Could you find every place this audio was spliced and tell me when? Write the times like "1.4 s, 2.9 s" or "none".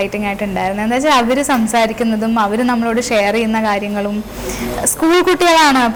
none